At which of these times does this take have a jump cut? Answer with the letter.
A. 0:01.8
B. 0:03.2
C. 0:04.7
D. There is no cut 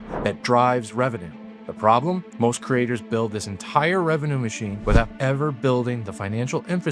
C